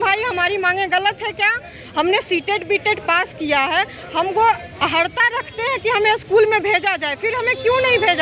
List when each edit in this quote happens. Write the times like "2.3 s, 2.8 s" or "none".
none